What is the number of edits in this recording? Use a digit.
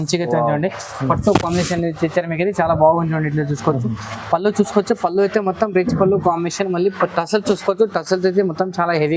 0